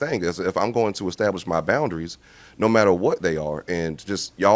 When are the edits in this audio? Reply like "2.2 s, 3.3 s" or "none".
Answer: none